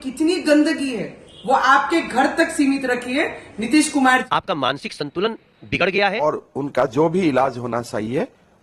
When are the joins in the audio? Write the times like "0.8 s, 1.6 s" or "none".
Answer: 4.2 s, 6.2 s